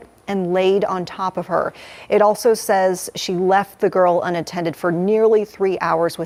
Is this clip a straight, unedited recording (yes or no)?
yes